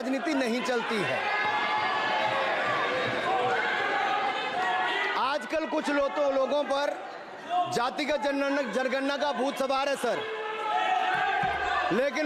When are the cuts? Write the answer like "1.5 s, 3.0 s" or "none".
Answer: none